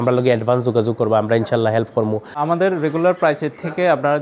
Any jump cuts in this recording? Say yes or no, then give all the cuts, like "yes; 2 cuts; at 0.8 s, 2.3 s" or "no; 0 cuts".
yes; 1 cut; at 2.3 s